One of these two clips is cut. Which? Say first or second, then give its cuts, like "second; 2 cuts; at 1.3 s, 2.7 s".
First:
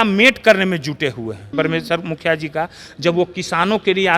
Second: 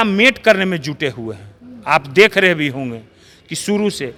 first; 1 cut; at 1.5 s